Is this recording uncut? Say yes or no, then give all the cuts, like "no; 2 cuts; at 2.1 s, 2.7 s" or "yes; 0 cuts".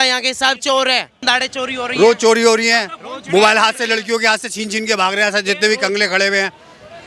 no; 1 cut; at 1.1 s